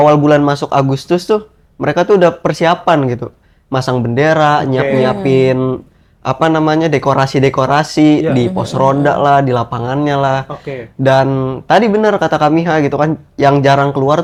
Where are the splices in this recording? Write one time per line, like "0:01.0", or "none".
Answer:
none

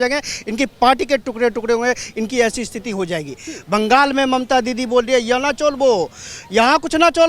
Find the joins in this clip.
none

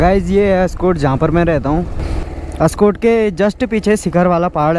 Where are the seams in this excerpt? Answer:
0:02.0

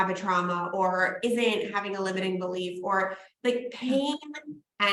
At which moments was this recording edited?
none

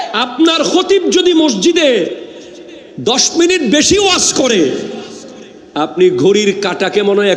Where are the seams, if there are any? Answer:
none

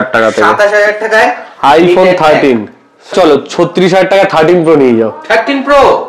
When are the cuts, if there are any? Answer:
0:03.1

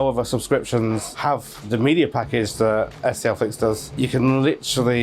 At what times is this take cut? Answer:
0:03.9

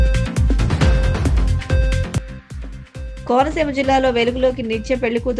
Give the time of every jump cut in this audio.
0:02.1

